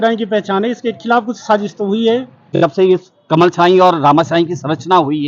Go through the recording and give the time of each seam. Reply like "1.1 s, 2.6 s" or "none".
2.5 s

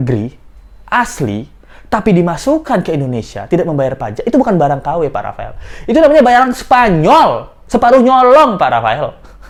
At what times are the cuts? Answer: none

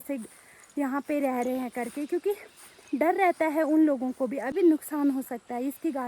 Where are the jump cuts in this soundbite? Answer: 4.5 s

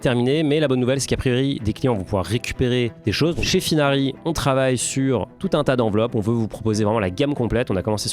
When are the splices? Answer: 3.4 s

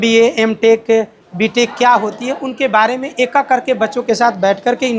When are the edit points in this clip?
none

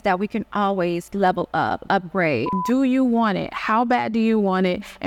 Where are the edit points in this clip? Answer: 2.5 s

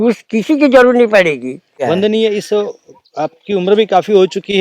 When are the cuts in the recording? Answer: 1.8 s

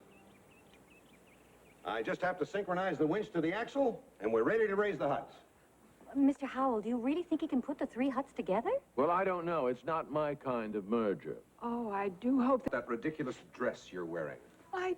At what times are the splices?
12.6 s

